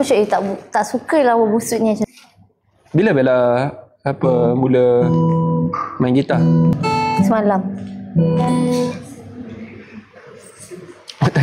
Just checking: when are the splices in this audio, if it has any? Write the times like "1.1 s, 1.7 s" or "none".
2.1 s, 6.7 s